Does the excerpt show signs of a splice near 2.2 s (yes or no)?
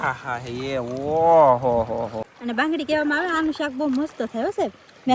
yes